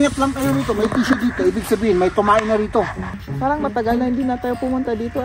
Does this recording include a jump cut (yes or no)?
yes